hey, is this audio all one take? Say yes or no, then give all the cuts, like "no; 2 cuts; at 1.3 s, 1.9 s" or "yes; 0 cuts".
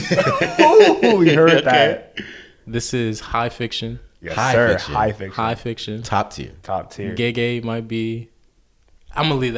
yes; 0 cuts